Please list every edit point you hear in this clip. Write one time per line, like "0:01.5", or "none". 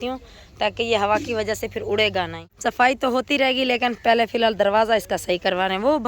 0:02.4